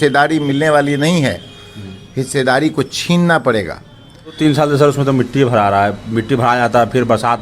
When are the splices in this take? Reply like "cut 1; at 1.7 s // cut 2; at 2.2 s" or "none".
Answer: cut 1; at 4.4 s